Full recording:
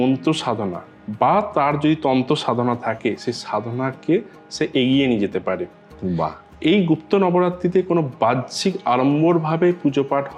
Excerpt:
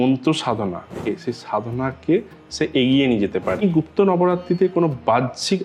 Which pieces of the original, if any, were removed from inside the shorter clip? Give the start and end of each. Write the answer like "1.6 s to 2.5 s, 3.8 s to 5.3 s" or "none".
1.0 s to 3.0 s, 5.6 s to 6.8 s